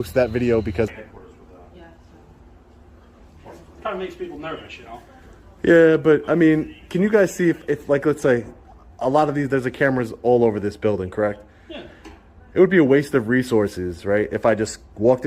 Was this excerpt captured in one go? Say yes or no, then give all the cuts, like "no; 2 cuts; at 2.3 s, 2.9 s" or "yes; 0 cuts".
no; 1 cut; at 1.0 s